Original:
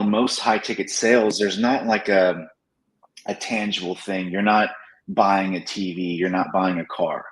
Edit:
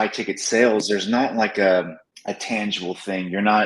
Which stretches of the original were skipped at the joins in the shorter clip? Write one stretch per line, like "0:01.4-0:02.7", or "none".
0:02.6-0:03.1